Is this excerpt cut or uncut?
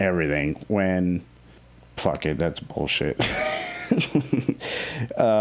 uncut